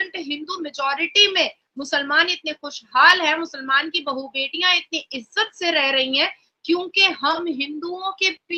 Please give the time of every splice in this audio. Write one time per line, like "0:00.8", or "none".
none